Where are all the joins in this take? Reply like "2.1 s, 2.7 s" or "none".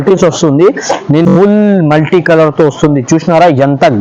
1.3 s